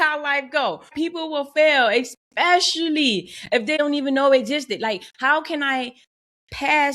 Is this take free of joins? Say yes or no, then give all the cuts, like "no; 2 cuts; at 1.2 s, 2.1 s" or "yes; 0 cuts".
no; 2 cuts; at 0.9 s, 3.8 s